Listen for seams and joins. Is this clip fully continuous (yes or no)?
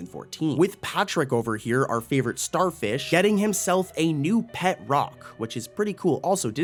yes